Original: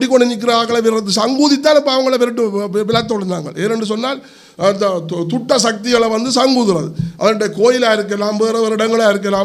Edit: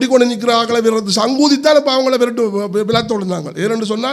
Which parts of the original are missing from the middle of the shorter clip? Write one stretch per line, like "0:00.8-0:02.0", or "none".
none